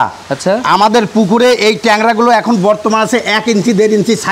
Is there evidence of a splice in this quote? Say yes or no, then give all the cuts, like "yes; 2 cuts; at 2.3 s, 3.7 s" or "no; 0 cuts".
no; 0 cuts